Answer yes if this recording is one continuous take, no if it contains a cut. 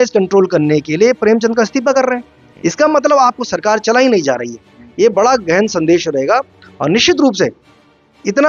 yes